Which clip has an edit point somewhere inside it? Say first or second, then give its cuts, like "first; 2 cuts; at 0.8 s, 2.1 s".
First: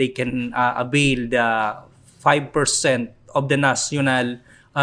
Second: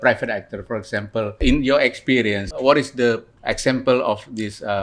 second; 3 cuts; at 1.4 s, 2.5 s, 3.3 s